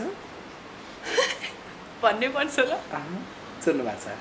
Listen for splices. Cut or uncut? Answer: uncut